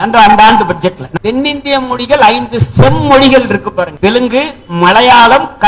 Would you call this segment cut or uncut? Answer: cut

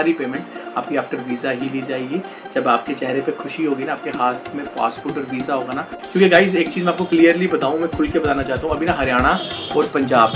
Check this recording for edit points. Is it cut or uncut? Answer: cut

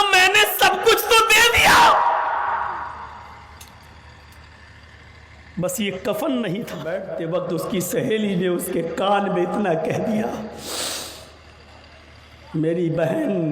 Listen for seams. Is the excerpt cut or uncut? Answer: cut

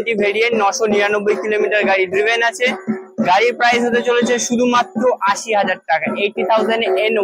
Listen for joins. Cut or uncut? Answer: uncut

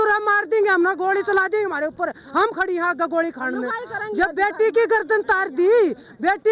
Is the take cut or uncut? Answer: uncut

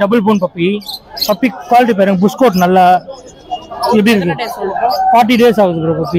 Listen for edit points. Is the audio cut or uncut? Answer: uncut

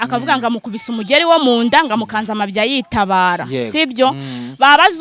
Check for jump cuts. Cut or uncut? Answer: uncut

